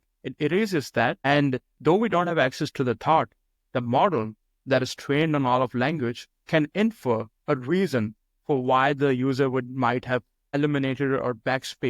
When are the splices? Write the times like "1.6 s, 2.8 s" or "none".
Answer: 1.2 s, 10.5 s